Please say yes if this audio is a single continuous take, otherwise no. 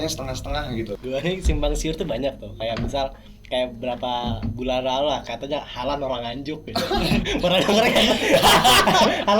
no